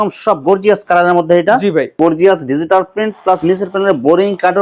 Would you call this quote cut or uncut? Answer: cut